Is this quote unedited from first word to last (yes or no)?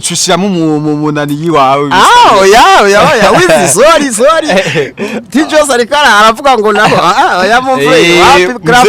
yes